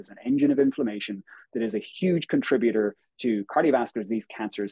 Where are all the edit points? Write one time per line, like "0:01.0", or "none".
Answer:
none